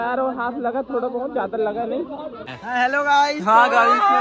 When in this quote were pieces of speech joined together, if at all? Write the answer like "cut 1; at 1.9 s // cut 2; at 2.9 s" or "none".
cut 1; at 2.4 s